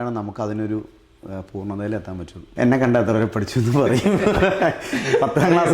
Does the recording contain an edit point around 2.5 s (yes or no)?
yes